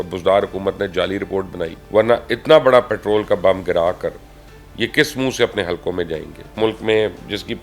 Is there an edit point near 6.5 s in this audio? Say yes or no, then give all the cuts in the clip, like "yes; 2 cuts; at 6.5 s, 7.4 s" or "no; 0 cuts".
yes; 2 cuts; at 1.8 s, 6.5 s